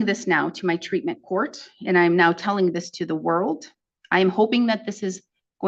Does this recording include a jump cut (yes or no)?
no